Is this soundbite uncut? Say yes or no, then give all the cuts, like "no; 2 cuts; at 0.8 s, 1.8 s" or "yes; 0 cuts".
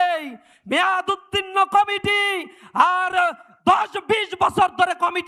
yes; 0 cuts